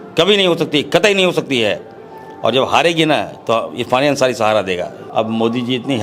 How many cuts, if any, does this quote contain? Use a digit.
1